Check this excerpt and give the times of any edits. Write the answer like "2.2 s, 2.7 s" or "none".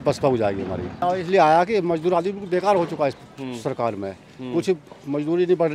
1.0 s